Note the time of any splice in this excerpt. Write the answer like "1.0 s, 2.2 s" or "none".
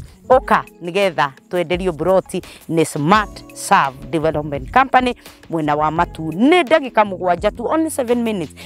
none